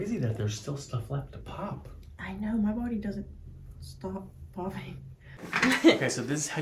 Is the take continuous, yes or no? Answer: no